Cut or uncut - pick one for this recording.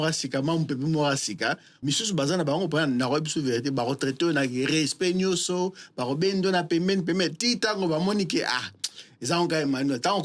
cut